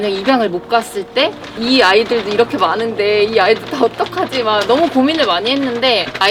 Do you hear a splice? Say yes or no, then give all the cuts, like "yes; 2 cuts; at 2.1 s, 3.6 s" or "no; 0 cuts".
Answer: no; 0 cuts